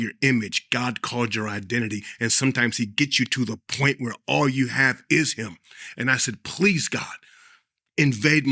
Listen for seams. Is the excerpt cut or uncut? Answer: uncut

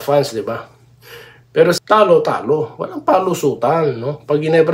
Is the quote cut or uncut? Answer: cut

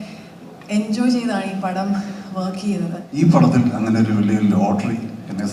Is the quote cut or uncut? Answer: cut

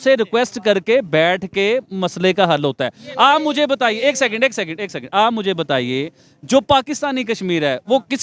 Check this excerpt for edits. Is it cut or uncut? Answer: uncut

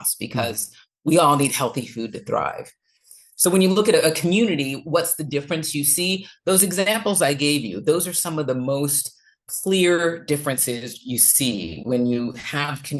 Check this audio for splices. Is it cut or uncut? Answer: uncut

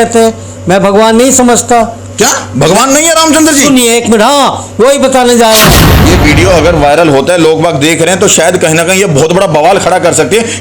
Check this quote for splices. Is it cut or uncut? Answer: cut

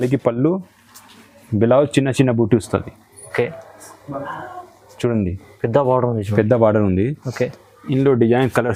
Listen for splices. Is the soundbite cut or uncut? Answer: uncut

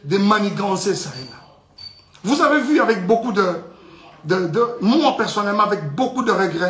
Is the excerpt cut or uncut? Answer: uncut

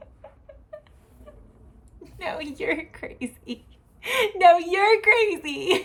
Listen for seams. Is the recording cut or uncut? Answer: uncut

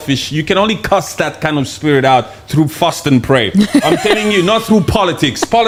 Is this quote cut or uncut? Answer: uncut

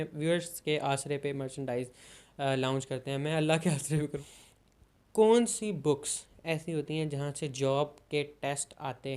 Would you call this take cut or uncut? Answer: cut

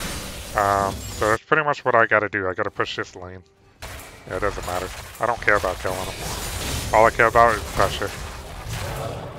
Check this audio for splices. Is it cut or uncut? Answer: cut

